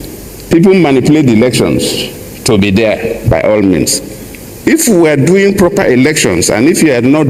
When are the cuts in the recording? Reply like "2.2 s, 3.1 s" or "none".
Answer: none